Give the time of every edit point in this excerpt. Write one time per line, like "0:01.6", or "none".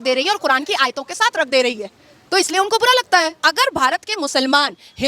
0:03.3